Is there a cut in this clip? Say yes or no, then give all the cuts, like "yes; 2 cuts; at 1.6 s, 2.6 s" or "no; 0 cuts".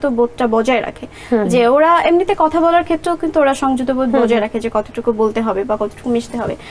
no; 0 cuts